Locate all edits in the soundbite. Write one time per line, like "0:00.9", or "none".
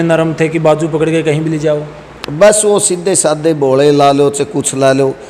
none